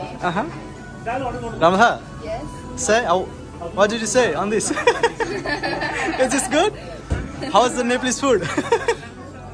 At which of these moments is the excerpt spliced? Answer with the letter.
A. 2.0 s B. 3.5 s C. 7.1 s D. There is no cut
D